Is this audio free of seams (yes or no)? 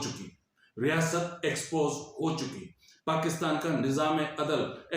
yes